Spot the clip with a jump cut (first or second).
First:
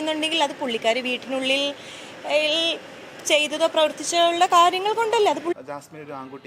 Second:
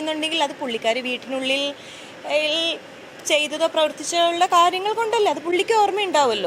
first